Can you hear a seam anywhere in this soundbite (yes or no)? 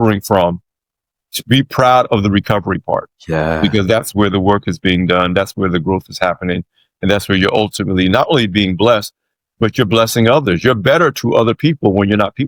no